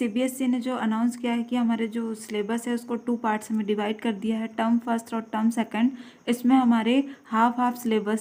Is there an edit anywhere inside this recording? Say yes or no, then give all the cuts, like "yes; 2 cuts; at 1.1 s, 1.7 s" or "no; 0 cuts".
no; 0 cuts